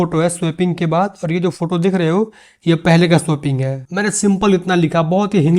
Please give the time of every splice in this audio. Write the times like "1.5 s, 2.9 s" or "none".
3.8 s